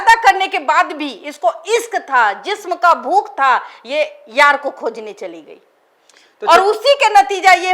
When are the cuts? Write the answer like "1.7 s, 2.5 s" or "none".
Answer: none

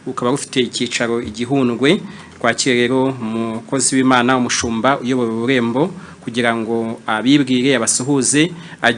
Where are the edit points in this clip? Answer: none

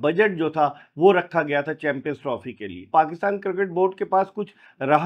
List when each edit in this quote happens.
2.8 s

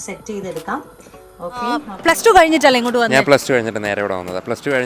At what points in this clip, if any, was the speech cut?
1.9 s

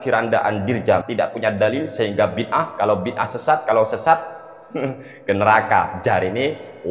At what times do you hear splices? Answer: 1.1 s

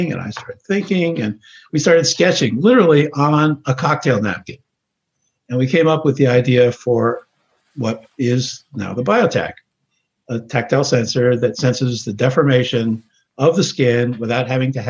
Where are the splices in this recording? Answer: none

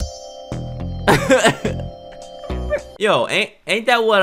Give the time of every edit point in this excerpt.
2.9 s

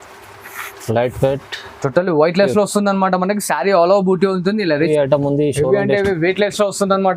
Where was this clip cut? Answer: 4.9 s

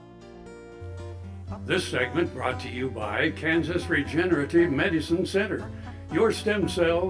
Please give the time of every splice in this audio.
none

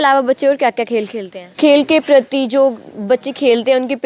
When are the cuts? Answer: 1.5 s

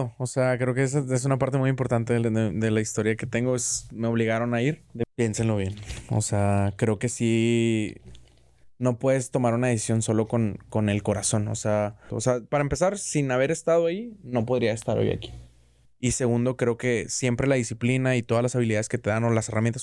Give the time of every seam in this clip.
5.1 s, 12.1 s

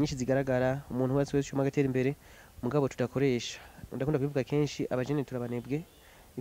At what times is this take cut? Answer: none

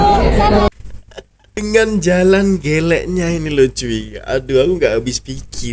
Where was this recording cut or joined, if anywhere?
1.6 s

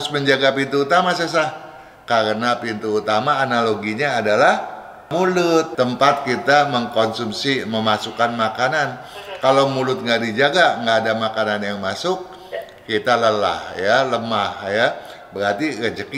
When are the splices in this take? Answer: 5.7 s

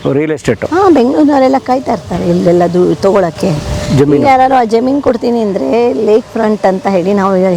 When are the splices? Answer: none

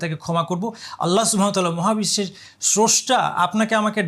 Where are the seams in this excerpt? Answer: none

